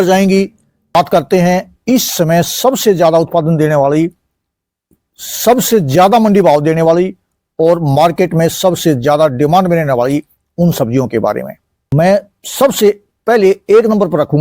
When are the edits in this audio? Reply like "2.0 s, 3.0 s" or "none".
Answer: 0.9 s, 11.9 s